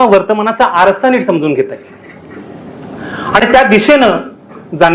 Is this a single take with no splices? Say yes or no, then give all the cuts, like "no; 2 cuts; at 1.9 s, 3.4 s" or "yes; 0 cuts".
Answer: yes; 0 cuts